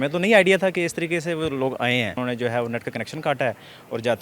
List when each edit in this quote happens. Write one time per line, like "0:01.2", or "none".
0:02.2